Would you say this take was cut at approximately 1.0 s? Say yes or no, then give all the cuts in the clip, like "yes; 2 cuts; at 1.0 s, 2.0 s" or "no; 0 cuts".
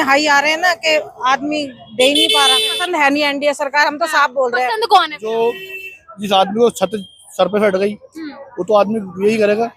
no; 2 cuts; at 2.8 s, 5.3 s